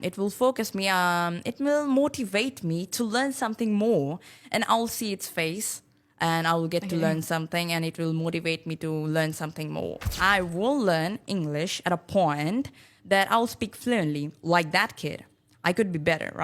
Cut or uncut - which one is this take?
cut